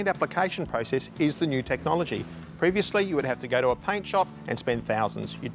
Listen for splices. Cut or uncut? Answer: uncut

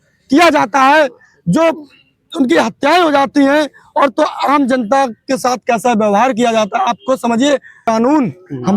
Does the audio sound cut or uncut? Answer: cut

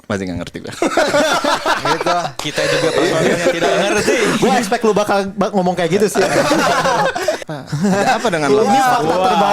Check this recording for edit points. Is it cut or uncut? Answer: cut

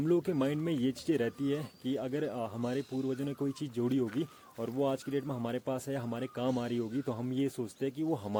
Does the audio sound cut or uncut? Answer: uncut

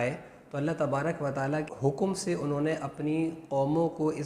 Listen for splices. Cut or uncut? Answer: cut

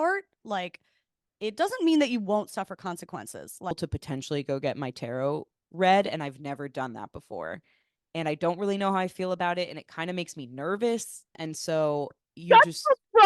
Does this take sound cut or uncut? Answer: cut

